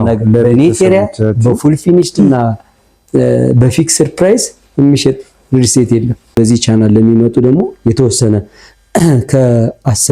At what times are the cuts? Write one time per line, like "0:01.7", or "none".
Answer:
0:06.3